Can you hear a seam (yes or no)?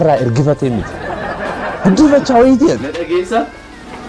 yes